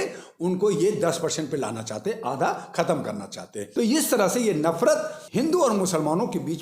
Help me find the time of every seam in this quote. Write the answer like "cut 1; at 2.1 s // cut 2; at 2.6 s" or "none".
cut 1; at 3.6 s // cut 2; at 5.2 s